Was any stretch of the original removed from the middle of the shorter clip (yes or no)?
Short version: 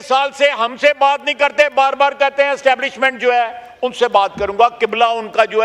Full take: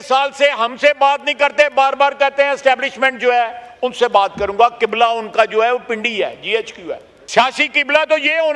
no